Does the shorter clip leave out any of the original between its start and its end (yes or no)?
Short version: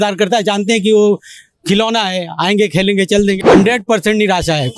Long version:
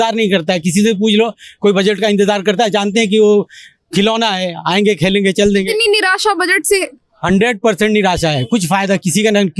yes